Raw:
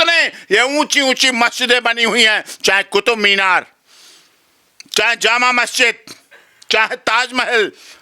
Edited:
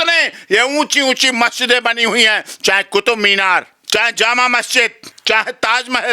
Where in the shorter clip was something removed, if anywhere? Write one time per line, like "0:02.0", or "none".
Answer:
0:03.8
0:05.1